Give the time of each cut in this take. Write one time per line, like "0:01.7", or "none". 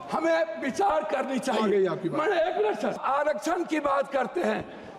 0:03.0